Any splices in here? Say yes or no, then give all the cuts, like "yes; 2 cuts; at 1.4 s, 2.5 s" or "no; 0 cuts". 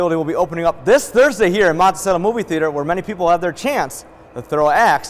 no; 0 cuts